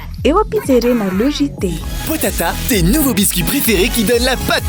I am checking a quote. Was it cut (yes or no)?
no